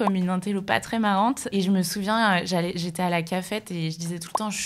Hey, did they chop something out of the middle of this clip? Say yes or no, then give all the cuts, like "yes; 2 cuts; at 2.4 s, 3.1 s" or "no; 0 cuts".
yes; 1 cut; at 1.5 s